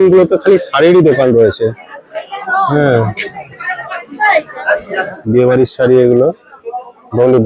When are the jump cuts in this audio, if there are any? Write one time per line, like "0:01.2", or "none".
0:05.1